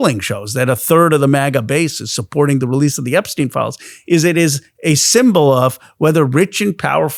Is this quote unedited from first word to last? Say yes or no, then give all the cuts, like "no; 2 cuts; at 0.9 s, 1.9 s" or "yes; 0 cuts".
yes; 0 cuts